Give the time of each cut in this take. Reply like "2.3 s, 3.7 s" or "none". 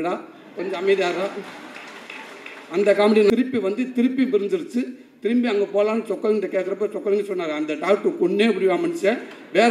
3.3 s